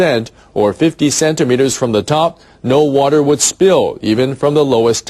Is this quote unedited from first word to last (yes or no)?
yes